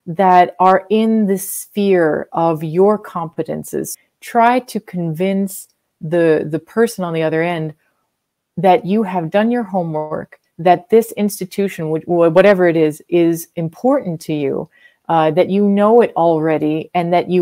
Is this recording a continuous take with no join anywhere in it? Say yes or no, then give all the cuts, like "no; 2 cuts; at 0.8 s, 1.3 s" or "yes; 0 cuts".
no; 1 cut; at 3.9 s